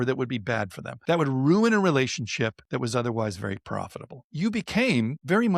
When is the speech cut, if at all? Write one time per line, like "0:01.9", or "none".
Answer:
0:00.9
0:02.6
0:04.2